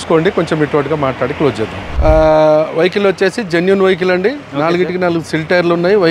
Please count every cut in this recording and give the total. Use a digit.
1